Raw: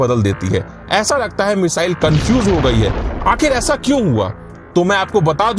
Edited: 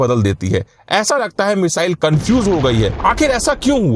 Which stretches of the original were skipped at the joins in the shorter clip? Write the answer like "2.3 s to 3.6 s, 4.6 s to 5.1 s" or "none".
2.9 s to 3.2 s